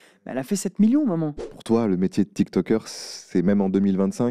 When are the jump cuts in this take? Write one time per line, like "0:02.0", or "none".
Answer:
0:01.5